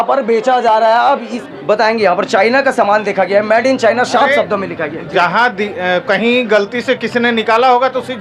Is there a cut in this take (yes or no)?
yes